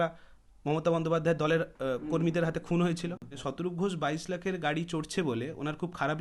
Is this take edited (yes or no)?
yes